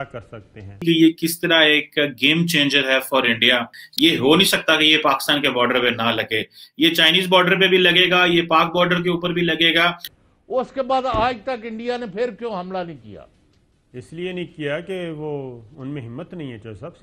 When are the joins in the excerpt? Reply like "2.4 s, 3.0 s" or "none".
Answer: 0.8 s, 3.8 s, 10.0 s